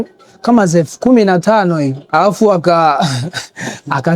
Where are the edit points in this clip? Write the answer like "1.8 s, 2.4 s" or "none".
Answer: 2.0 s